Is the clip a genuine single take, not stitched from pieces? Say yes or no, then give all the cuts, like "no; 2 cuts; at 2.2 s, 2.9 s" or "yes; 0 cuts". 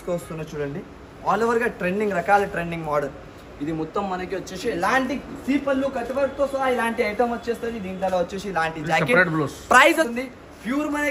no; 1 cut; at 10.1 s